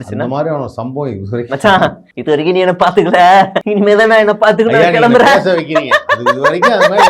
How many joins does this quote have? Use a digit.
2